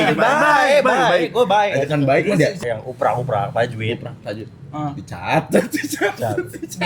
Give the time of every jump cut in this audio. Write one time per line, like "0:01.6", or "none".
0:02.6